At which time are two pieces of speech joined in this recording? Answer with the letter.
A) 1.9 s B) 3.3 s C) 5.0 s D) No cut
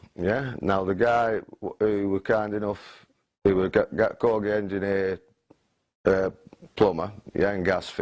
A